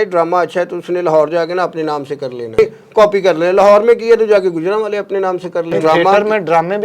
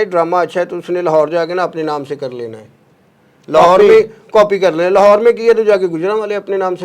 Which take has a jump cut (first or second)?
first